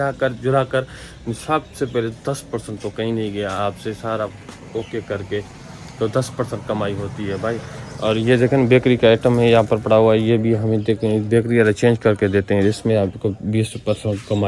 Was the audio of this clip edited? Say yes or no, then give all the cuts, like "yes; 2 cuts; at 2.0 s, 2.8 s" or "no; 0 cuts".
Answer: no; 0 cuts